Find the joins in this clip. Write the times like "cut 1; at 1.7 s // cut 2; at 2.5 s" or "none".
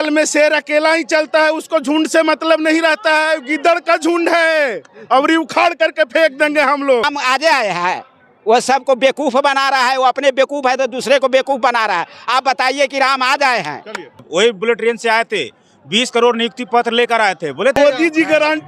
cut 1; at 7.1 s // cut 2; at 14.3 s // cut 3; at 17.8 s